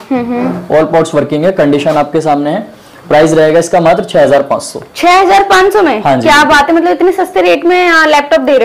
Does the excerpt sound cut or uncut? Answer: uncut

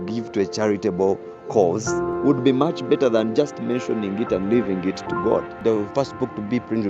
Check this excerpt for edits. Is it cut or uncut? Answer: cut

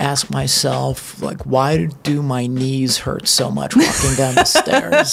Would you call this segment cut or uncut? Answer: uncut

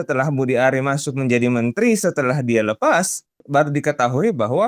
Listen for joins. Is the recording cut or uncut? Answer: cut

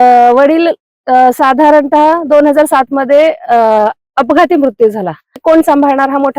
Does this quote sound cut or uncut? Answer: cut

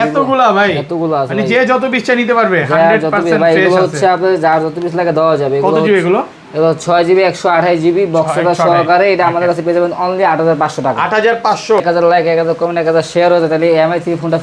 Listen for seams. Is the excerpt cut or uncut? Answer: cut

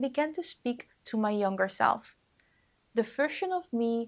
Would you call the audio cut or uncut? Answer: uncut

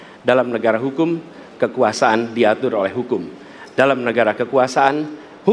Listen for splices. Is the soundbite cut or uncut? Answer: uncut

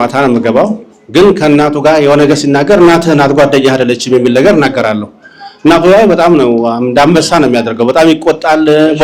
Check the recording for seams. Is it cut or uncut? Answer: uncut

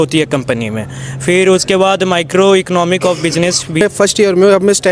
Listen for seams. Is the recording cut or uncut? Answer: cut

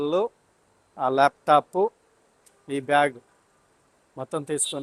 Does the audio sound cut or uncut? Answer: uncut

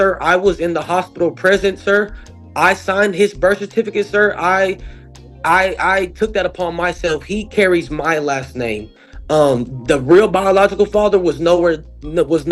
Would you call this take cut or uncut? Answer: uncut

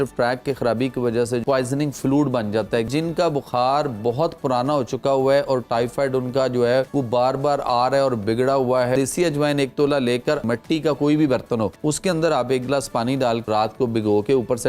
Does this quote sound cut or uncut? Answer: cut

